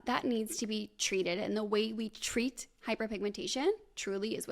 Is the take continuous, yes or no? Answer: yes